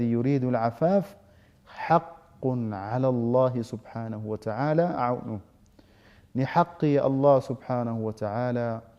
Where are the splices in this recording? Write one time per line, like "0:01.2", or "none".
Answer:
none